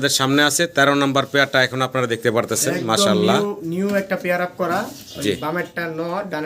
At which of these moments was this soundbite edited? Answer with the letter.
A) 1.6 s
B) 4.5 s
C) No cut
C